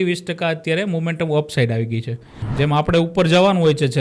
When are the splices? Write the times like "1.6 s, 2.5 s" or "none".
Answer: 2.4 s